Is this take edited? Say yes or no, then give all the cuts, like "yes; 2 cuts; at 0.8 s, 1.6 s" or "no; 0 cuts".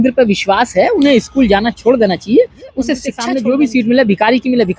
yes; 1 cut; at 3.1 s